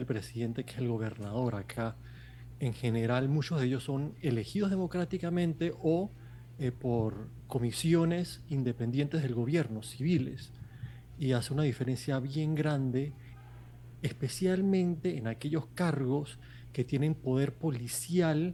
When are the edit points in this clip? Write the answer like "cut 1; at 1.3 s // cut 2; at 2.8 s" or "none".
none